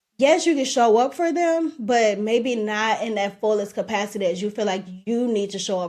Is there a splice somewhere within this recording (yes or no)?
no